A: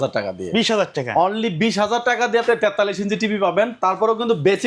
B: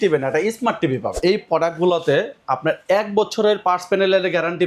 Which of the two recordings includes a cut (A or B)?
B